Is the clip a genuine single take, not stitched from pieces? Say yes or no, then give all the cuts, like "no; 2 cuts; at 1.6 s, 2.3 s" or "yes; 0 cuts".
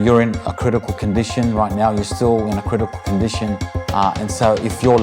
no; 1 cut; at 3.7 s